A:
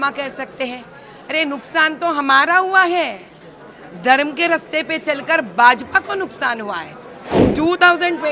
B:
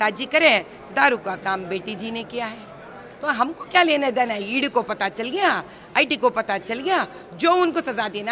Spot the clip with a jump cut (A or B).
A